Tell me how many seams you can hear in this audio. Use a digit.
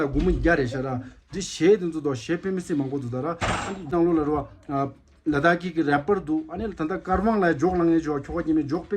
1